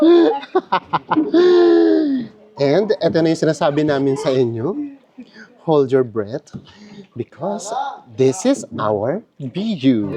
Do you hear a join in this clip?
no; 0 cuts

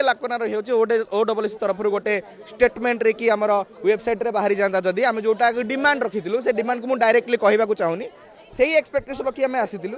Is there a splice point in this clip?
no; 0 cuts

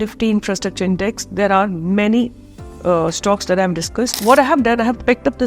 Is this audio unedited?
no; 1 cut; at 4.2 s

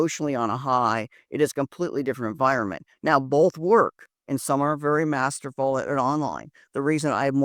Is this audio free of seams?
yes; 0 cuts

